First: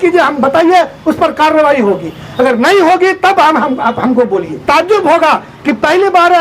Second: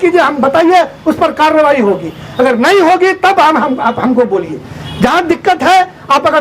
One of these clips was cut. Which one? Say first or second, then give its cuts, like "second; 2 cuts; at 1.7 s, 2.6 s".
first; 1 cut; at 4.6 s